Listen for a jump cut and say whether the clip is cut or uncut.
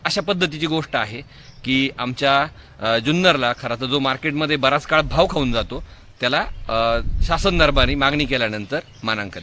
uncut